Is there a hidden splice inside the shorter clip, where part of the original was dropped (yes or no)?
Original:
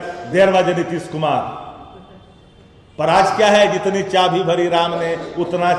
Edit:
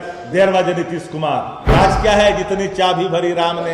yes